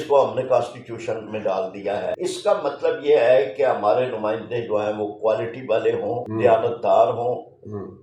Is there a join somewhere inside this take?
yes; 2 cuts; at 2.2 s, 6.3 s

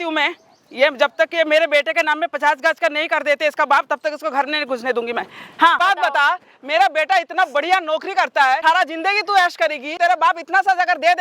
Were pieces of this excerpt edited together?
yes; 3 cuts; at 5.8 s, 8.6 s, 9.9 s

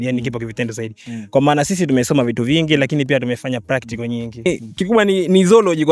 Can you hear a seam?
yes; 1 cut; at 4.5 s

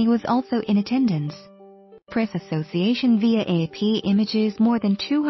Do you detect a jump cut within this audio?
yes; 2 cuts; at 2.3 s, 4.0 s

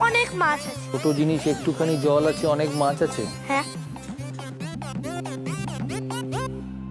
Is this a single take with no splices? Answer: yes; 0 cuts

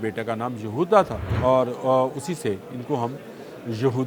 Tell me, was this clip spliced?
yes; 1 cut; at 1.2 s

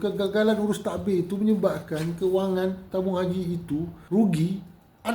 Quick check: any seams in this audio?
yes; 1 cut; at 4.0 s

